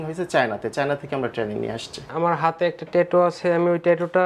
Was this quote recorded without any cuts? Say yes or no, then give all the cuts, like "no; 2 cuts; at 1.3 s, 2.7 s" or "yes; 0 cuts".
no; 1 cut; at 2.1 s